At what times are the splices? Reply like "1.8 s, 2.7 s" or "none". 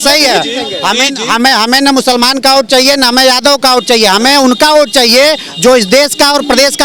none